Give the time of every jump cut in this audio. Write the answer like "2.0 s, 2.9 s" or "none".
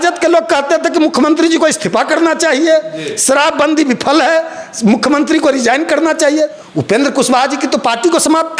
6.6 s